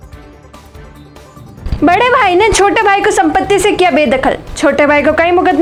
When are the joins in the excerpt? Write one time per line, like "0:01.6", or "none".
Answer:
none